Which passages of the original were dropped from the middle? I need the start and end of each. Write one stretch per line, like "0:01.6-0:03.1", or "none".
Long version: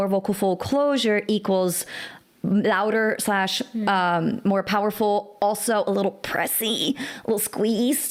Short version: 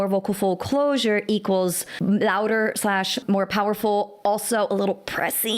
0:01.9-0:02.3
0:03.7-0:04.4

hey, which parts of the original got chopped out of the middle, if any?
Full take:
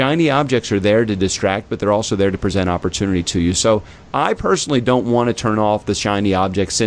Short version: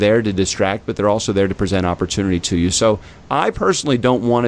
none

